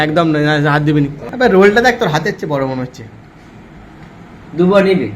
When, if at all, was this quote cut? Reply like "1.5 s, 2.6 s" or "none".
1.2 s

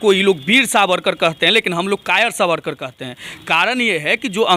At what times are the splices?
none

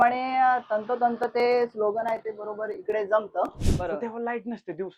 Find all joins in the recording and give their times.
3.6 s

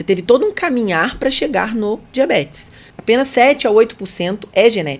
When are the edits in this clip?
2.9 s

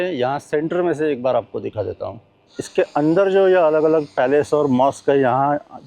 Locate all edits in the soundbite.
2.5 s

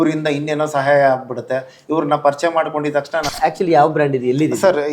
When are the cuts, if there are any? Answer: 3.3 s

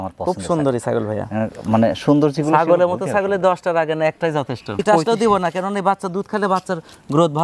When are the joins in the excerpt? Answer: 4.6 s

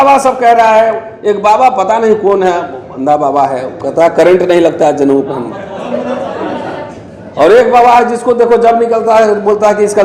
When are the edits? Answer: none

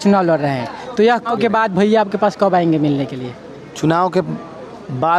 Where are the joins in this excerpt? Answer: 1.2 s

